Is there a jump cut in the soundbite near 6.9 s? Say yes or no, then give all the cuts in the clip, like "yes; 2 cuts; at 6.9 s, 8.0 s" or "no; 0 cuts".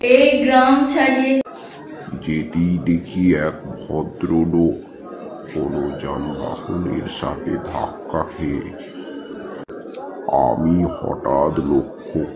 no; 2 cuts; at 1.4 s, 9.7 s